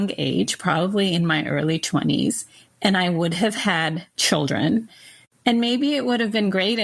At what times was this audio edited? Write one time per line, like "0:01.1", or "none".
0:04.1
0:04.9